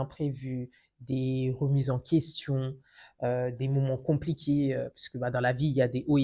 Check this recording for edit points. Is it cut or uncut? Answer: uncut